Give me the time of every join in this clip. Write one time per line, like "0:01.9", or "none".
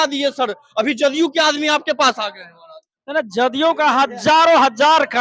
none